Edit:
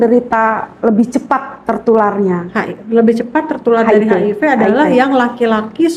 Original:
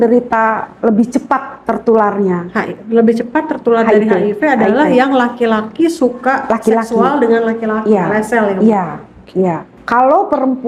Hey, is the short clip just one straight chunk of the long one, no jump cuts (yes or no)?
yes